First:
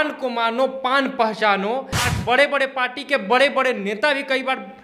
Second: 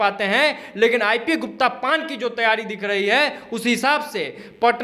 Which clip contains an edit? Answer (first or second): first